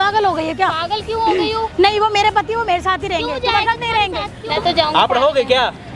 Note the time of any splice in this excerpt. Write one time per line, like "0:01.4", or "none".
0:04.4